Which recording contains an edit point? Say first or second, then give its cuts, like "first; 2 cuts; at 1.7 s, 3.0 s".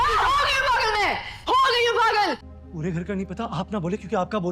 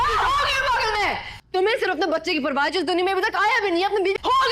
first; 2 cuts; at 1.4 s, 2.4 s